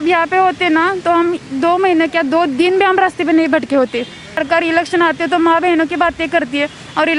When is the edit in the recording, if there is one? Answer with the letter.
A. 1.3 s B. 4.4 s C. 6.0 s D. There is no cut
B